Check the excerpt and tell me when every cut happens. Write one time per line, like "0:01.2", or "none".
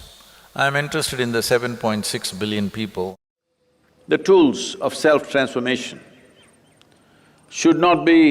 0:03.1